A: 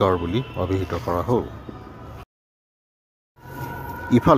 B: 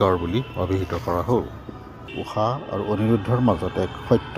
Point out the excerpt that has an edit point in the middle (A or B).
B